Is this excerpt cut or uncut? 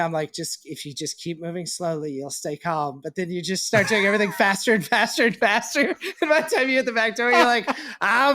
uncut